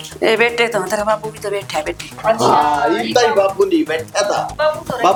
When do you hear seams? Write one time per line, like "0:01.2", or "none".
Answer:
none